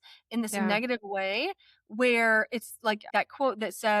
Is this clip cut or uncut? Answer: cut